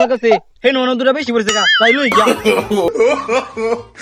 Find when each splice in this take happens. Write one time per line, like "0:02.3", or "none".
0:02.9